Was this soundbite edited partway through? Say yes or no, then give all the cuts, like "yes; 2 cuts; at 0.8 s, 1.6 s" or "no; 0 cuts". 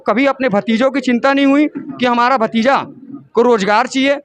no; 0 cuts